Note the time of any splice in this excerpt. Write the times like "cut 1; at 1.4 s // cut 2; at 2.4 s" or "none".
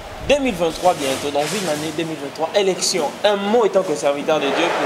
none